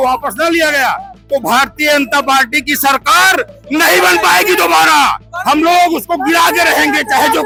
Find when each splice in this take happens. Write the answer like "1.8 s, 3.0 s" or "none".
none